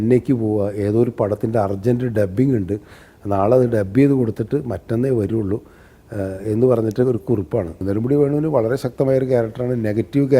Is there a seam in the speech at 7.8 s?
yes; 1 cut; at 7.8 s

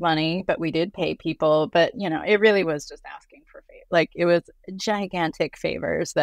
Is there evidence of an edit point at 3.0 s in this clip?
no; 0 cuts

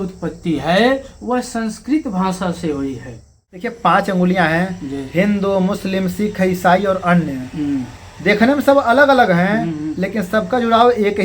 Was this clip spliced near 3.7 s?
yes; 1 cut; at 3.7 s

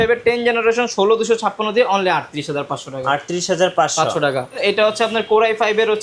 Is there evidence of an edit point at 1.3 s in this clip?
no; 1 cut; at 4.6 s

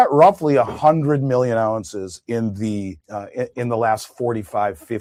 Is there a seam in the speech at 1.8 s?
no; 0 cuts

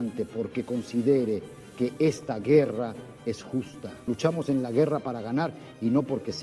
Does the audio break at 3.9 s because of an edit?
yes; 1 cut; at 3.9 s

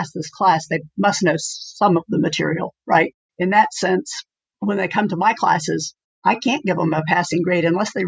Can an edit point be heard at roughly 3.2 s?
yes; 1 cut; at 3.2 s

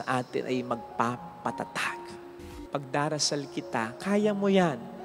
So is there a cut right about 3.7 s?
no; 1 cut; at 2.3 s

